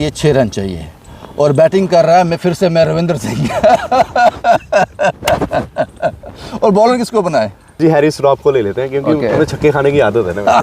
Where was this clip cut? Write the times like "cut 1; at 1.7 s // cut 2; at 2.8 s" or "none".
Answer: cut 1; at 7.8 s

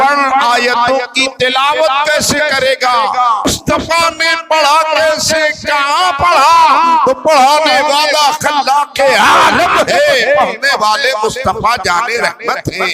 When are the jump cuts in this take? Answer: cut 1; at 3.5 s

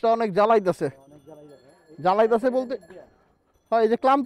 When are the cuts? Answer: none

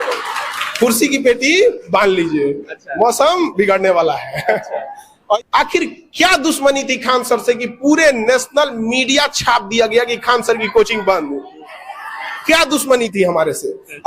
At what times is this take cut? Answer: cut 1; at 5.4 s

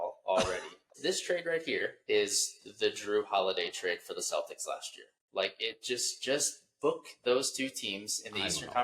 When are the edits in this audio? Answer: cut 1; at 0.9 s // cut 2; at 2.0 s

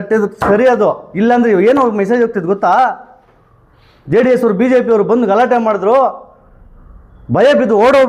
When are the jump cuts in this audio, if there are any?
cut 1; at 1.1 s

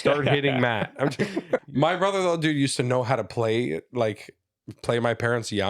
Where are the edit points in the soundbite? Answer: cut 1; at 1.6 s

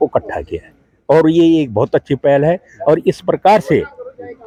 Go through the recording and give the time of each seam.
none

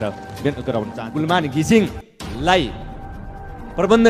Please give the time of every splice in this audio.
cut 1; at 1.0 s

